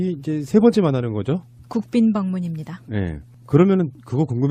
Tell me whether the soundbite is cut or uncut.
uncut